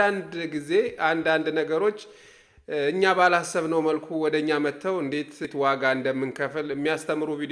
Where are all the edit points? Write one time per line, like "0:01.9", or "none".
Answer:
0:05.4